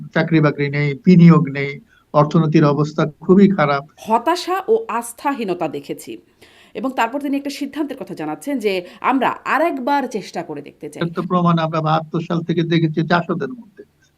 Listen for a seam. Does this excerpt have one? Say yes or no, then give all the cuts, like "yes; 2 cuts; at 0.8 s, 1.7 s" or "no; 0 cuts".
yes; 2 cuts; at 3.9 s, 11.0 s